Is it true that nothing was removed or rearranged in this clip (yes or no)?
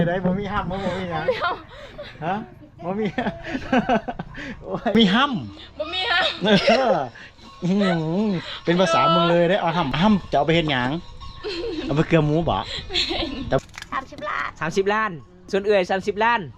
no